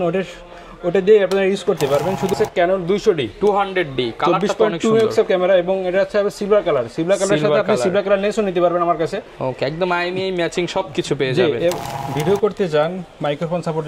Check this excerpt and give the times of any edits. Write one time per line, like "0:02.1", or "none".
0:02.3
0:12.1